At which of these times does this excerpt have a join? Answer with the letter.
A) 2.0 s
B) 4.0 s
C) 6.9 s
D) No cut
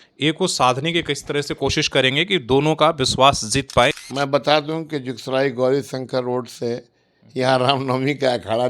B